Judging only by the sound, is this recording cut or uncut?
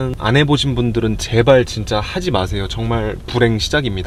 uncut